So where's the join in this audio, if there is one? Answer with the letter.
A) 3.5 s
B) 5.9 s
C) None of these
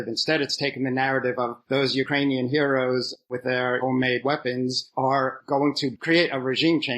B